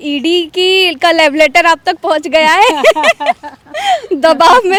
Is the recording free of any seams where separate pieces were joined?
yes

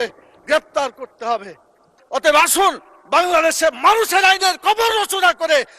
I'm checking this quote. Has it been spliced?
yes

